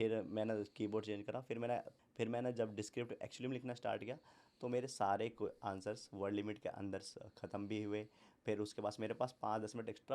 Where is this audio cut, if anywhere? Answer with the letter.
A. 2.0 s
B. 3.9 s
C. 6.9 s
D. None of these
A